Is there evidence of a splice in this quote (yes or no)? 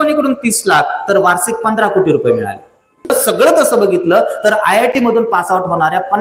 yes